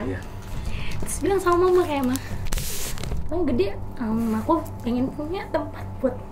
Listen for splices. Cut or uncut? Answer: uncut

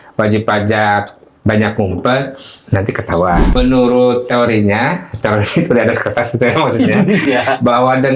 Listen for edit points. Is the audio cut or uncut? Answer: cut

